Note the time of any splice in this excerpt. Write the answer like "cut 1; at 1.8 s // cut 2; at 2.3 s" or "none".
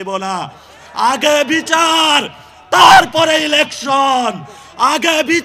none